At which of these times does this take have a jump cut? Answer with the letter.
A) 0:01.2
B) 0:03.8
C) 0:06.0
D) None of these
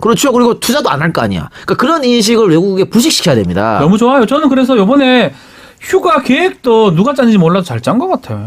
C